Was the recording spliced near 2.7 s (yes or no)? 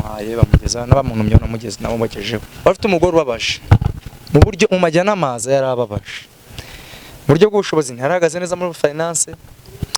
yes